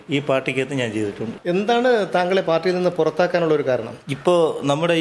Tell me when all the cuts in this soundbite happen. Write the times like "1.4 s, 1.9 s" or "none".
1.3 s